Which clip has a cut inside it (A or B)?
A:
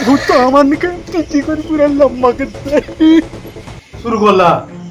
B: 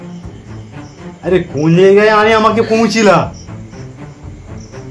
A